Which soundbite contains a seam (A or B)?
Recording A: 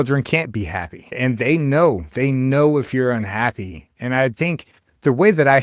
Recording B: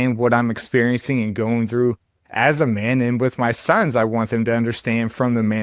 A